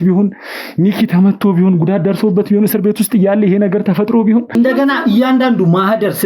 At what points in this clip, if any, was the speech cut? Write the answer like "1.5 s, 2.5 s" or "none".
4.5 s